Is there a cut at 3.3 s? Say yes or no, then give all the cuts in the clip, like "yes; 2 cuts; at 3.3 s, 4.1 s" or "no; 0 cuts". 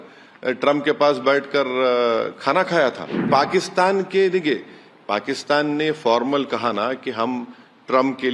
yes; 1 cut; at 3.3 s